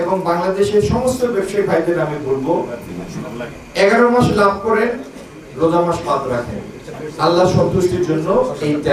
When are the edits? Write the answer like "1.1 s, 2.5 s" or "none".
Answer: none